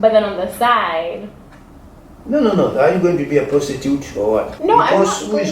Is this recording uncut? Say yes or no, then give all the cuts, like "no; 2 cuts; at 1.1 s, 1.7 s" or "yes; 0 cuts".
no; 1 cut; at 4.5 s